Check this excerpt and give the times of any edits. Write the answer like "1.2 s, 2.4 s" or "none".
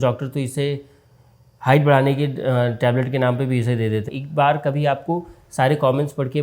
4.2 s